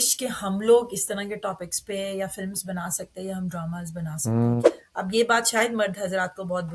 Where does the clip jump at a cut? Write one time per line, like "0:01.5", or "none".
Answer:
0:04.8